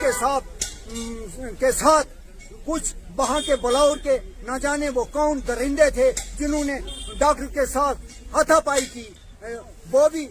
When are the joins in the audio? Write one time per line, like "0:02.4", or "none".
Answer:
none